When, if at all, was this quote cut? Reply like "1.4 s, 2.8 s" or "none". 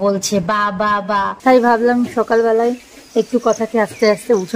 1.3 s